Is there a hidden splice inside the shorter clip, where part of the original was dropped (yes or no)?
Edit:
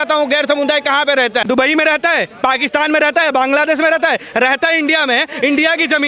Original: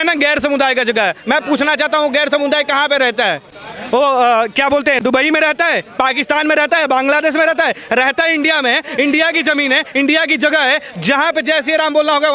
yes